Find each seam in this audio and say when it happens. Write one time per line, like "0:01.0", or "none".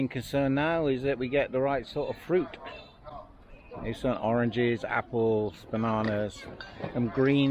none